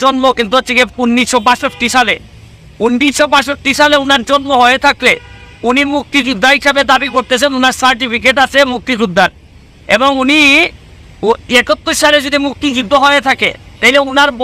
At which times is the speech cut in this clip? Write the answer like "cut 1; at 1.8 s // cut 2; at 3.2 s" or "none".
none